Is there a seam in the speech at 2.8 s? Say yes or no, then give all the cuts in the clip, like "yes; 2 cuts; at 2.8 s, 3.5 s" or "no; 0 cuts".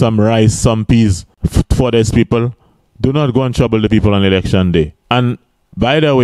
no; 2 cuts; at 1.3 s, 5.0 s